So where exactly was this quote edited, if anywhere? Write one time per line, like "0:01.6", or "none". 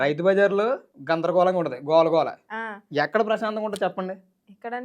0:00.9

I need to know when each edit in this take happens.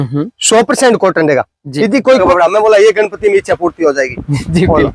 0:02.2

